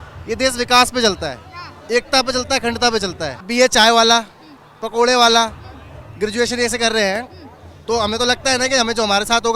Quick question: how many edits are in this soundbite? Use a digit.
1